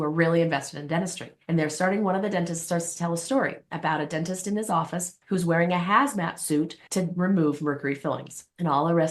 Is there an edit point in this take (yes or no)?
no